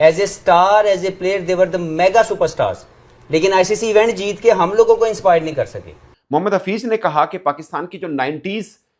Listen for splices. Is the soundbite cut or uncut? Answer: cut